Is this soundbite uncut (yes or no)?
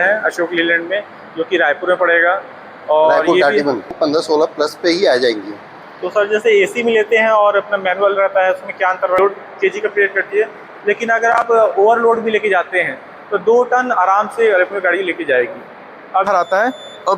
no